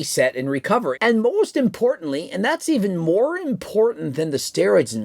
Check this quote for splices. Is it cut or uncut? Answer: cut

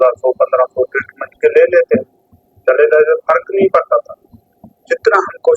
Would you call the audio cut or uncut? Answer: uncut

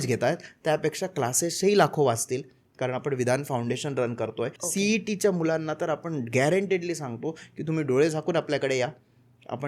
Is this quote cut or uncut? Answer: cut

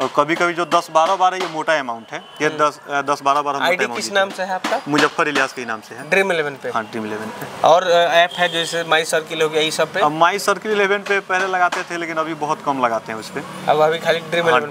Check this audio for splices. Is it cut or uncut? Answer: uncut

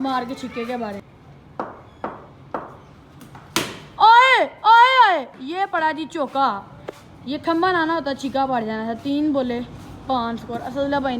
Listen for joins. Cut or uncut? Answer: cut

